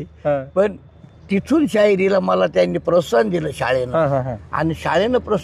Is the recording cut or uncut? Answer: uncut